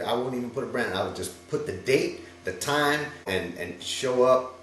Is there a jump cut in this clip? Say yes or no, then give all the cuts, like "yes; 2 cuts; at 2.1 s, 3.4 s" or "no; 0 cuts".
yes; 1 cut; at 3.3 s